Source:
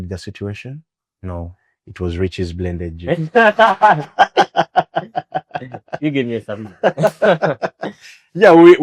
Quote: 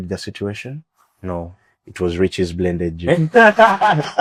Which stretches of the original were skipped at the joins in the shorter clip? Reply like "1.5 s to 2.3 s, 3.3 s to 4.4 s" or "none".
none